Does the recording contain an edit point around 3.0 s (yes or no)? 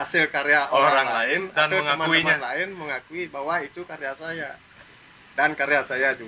no